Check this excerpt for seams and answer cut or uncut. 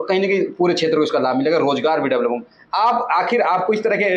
uncut